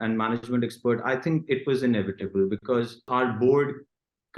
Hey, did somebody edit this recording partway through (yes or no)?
yes